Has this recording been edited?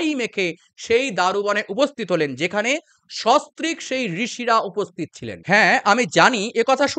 no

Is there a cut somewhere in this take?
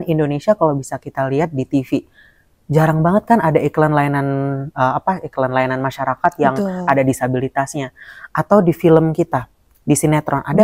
no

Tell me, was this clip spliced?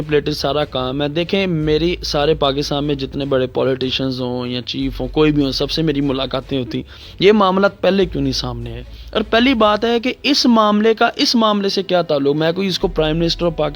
no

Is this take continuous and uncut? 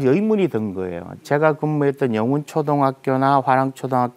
yes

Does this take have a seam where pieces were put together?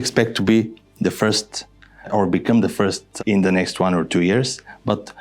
yes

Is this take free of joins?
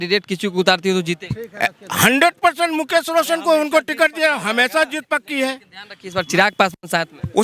yes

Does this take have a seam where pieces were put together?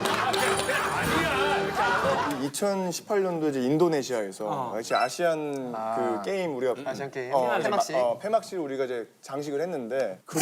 yes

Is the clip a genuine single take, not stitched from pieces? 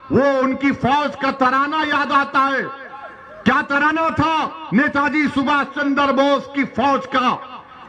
yes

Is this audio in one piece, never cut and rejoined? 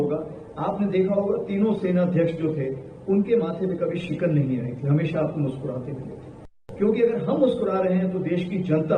no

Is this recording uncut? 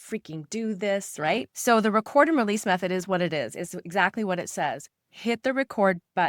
yes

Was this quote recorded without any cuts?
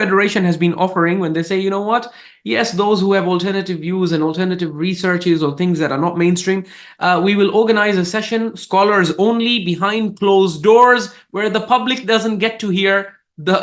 yes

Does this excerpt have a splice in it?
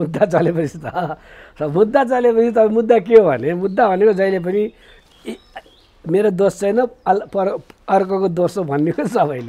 no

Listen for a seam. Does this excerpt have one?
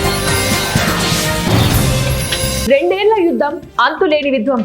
yes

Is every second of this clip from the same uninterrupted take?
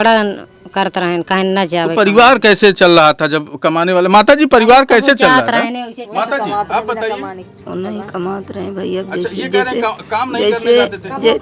yes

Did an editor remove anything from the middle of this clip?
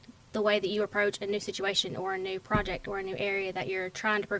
no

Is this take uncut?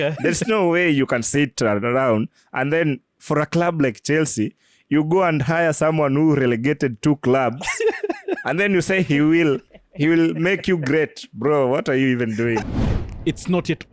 no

